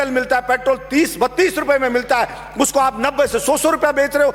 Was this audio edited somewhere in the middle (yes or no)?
no